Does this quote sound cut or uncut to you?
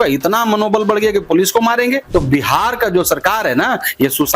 cut